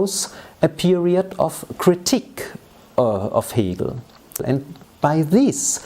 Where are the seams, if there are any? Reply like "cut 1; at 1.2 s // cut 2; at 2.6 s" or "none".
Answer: cut 1; at 4.4 s